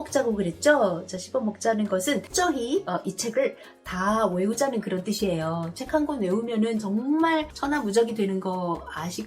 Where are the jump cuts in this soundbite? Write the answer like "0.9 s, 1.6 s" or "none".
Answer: 2.3 s, 7.5 s